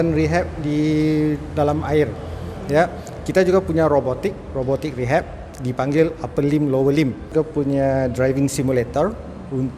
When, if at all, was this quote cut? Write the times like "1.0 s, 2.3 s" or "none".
7.3 s